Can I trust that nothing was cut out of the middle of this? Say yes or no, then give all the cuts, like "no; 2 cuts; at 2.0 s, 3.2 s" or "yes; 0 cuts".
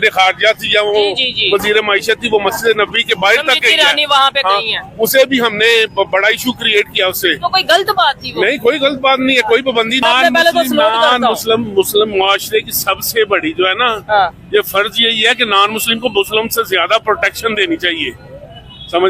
no; 1 cut; at 10.0 s